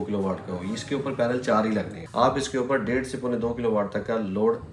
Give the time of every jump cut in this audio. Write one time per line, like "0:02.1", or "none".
0:02.0